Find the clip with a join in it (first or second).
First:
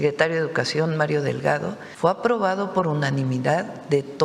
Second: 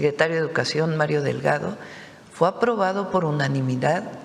first